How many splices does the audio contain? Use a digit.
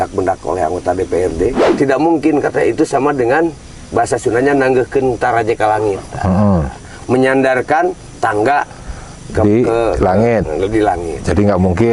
1